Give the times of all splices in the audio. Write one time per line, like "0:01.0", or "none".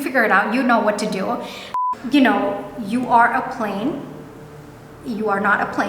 0:01.7